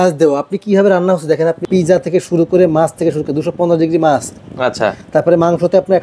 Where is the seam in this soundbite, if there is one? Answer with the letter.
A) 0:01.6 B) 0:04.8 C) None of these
A